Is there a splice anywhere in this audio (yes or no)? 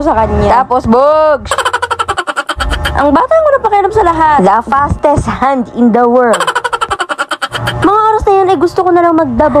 no